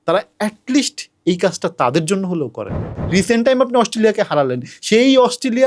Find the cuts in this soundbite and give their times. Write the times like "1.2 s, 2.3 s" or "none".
2.9 s